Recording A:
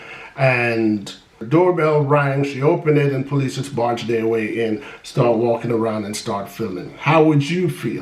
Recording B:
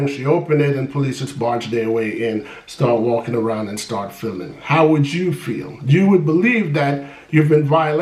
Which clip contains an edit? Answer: A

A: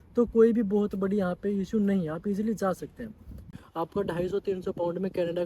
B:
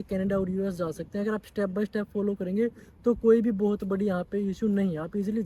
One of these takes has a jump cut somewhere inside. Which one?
A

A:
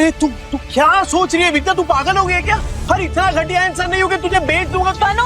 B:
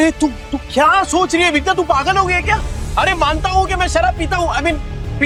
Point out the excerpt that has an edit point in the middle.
A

